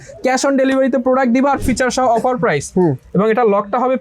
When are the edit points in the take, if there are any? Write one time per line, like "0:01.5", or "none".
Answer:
0:01.6